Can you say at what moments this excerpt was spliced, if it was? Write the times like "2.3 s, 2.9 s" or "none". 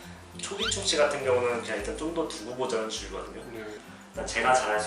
3.8 s